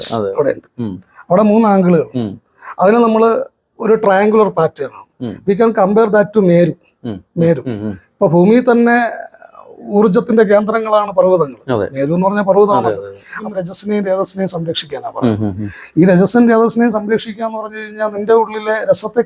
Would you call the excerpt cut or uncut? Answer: cut